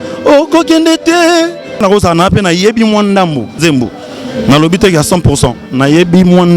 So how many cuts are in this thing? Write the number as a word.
two